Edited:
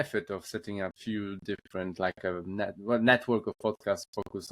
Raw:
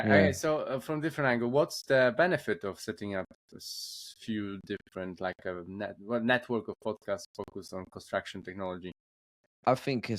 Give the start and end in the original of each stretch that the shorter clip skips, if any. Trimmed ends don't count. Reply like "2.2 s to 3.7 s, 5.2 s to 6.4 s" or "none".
3.3 s to 4.2 s